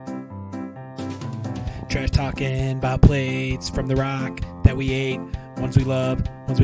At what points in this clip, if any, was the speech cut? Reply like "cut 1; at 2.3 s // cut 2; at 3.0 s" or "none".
cut 1; at 0.9 s